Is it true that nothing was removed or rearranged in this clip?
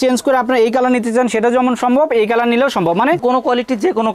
yes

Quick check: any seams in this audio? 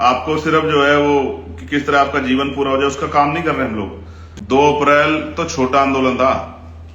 yes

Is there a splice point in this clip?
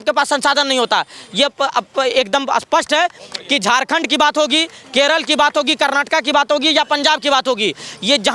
no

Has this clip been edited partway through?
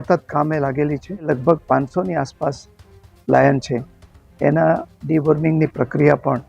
yes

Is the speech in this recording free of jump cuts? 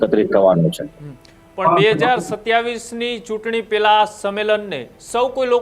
yes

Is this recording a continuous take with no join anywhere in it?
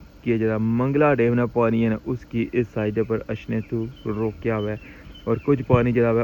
yes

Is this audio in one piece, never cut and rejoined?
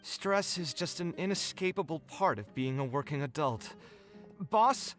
yes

